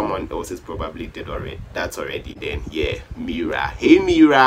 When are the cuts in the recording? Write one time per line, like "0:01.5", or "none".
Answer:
0:02.3